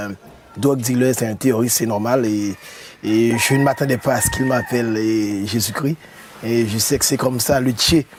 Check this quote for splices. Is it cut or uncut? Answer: uncut